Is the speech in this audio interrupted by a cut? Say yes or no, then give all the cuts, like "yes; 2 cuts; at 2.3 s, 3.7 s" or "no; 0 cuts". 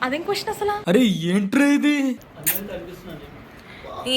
yes; 1 cut; at 2.2 s